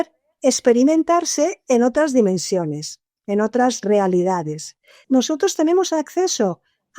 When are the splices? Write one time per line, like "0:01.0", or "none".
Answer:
0:05.0